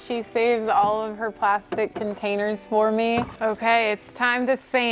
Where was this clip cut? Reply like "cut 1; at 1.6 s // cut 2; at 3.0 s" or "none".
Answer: cut 1; at 3.3 s